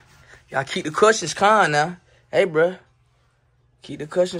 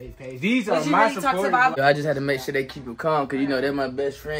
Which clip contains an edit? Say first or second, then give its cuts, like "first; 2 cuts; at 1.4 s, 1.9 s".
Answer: second; 1 cut; at 1.7 s